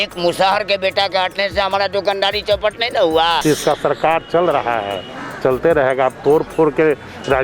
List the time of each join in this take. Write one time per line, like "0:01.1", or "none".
0:03.4